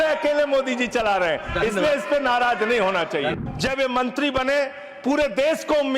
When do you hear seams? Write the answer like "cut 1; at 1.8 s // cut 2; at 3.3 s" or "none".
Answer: cut 1; at 3.3 s